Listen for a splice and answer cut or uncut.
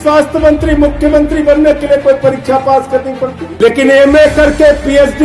cut